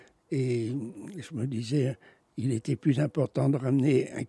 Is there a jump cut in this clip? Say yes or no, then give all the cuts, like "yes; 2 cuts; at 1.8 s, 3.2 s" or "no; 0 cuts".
no; 0 cuts